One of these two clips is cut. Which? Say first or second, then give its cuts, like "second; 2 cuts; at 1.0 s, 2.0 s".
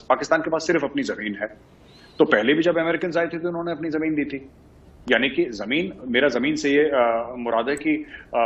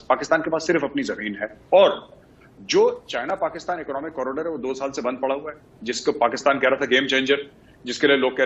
second; 1 cut; at 1.5 s